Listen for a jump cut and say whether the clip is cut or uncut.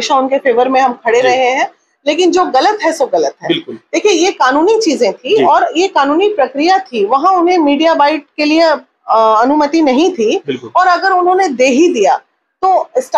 uncut